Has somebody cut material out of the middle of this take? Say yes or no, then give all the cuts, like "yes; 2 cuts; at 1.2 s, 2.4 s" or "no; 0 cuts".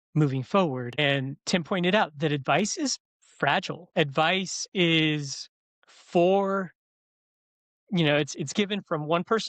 yes; 2 cuts; at 0.9 s, 3.8 s